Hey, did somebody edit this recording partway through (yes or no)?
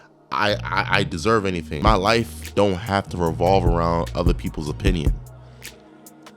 yes